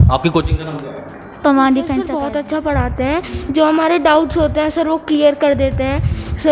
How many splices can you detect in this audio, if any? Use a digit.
1